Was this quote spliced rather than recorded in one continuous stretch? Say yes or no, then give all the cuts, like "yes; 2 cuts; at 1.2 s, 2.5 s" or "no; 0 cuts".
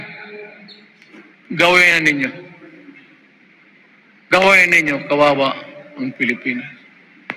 no; 0 cuts